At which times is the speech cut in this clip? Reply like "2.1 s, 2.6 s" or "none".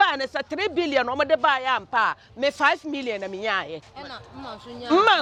none

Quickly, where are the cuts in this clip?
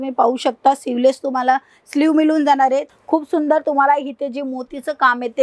2.9 s

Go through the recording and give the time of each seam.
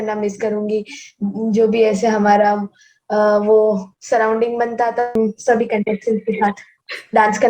5.1 s

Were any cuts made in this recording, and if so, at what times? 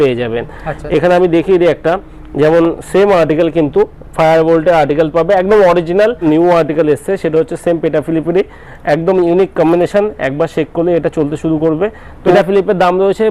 6.2 s, 12.3 s

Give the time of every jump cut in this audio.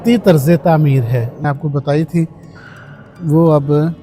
1.4 s

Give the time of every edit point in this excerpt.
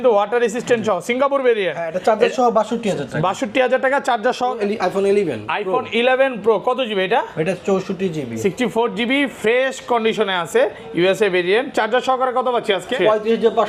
4.5 s

